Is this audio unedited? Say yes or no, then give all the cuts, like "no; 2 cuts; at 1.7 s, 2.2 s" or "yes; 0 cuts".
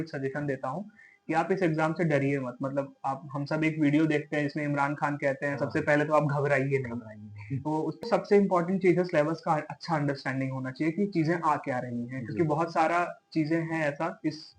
no; 1 cut; at 8.0 s